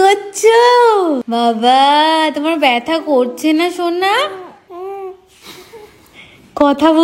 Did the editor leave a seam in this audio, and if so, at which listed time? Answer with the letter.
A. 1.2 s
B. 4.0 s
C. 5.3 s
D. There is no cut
A